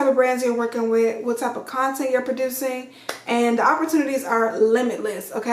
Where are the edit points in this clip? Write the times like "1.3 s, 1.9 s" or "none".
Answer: none